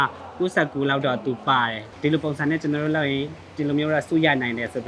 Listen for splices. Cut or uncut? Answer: cut